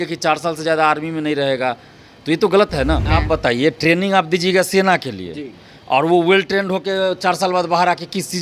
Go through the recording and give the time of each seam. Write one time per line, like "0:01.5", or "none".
0:03.1